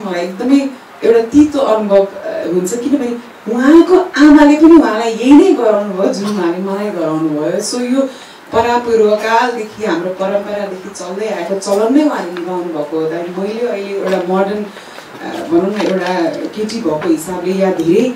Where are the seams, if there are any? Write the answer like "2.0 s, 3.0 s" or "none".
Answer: none